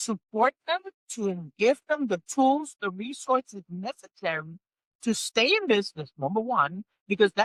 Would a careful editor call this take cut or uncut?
uncut